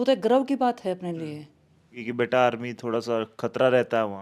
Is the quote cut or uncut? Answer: cut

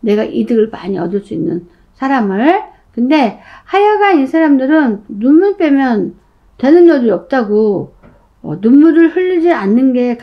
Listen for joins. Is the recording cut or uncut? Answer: cut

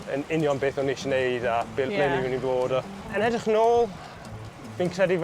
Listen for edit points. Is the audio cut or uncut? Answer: cut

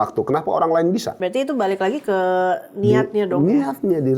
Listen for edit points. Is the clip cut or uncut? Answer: cut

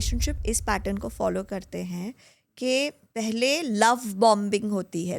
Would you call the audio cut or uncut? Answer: uncut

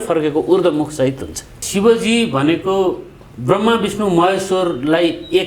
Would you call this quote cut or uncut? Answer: cut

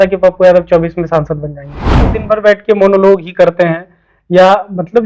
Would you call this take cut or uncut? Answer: cut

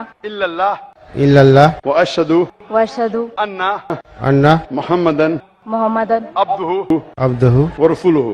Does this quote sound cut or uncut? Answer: cut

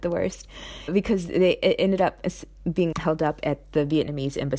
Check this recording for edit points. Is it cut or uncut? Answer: uncut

